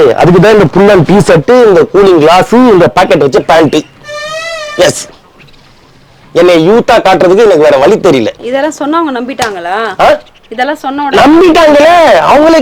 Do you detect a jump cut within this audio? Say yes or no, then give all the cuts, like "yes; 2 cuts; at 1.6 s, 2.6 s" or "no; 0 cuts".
no; 0 cuts